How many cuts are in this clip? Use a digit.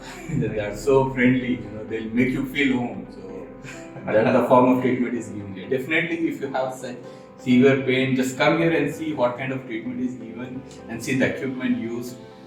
0